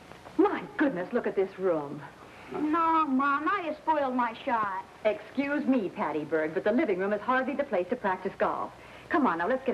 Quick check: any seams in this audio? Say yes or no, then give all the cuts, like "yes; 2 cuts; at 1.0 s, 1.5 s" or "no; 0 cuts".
no; 0 cuts